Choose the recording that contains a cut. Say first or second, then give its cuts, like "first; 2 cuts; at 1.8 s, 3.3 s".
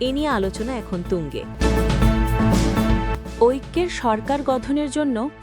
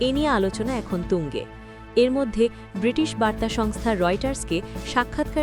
first; 2 cuts; at 1.5 s, 3.4 s